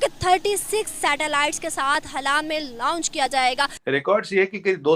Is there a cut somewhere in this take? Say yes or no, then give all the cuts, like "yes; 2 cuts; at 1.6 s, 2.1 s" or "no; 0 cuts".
yes; 1 cut; at 3.7 s